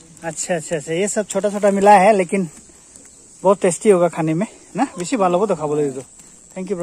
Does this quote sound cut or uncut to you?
uncut